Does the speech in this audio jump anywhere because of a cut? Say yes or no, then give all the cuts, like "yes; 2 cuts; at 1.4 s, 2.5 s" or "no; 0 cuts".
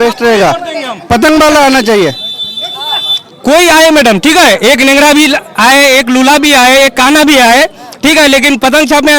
no; 0 cuts